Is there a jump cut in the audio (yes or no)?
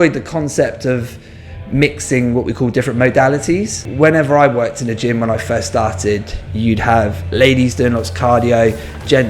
yes